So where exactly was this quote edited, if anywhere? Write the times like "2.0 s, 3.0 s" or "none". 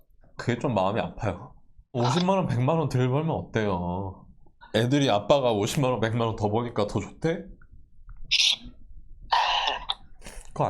2.0 s